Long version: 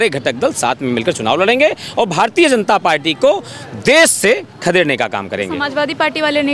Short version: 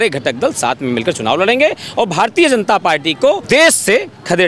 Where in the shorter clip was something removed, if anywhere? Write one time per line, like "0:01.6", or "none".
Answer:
0:03.4